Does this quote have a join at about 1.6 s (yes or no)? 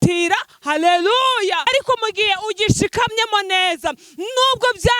yes